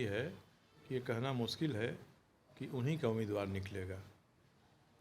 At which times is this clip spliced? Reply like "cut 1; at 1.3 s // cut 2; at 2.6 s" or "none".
none